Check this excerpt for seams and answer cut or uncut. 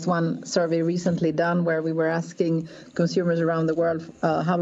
uncut